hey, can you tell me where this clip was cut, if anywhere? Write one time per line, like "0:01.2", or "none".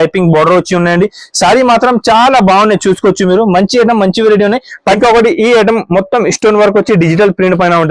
0:04.9